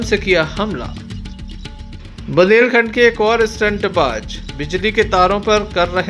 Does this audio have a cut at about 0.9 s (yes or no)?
yes